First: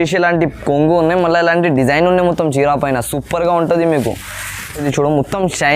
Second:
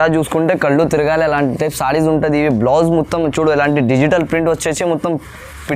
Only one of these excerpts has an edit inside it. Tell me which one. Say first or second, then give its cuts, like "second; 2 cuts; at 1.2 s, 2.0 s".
first; 1 cut; at 4.8 s